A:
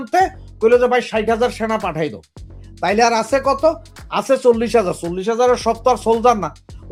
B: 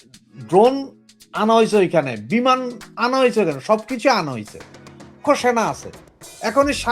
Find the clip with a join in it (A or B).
B